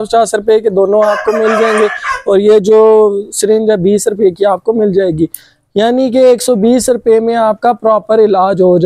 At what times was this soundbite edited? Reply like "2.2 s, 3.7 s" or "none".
none